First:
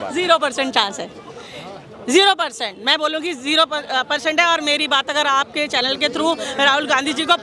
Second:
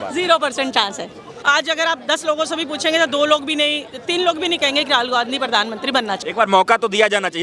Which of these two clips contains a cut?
second; 2 cuts; at 1.3 s, 6.2 s

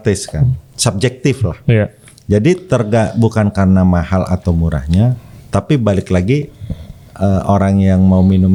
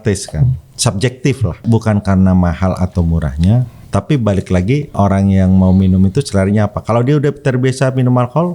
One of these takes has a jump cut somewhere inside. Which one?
second; 3 cuts; at 1.6 s, 3.7 s, 4.9 s

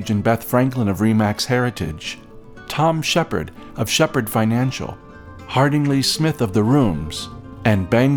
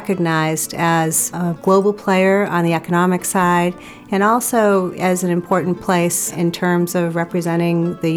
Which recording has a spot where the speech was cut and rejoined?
second; 2 cuts; at 1.4 s, 6.3 s

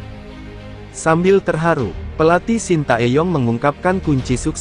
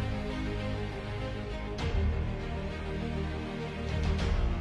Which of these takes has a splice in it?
first; 1 cut; at 1.0 s

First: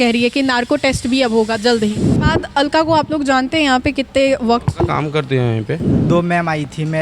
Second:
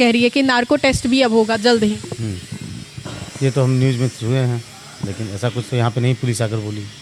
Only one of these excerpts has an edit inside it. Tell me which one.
first; 2 cuts; at 2.1 s, 5.9 s

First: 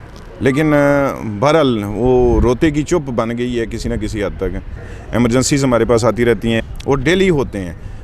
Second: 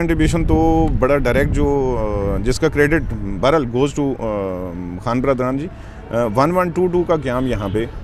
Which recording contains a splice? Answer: first; 2 cuts; at 4.9 s, 6.6 s

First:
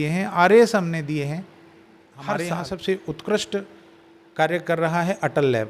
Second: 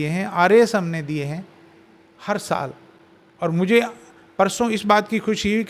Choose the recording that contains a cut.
first; 1 cut; at 2.4 s

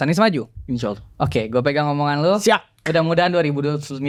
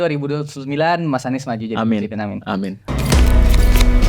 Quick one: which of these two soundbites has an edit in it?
second; 1 cut; at 2.8 s

